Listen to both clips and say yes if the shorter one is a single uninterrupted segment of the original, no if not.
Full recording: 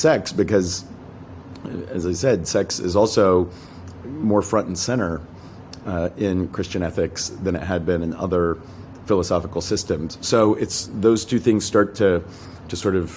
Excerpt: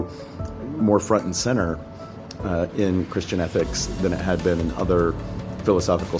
yes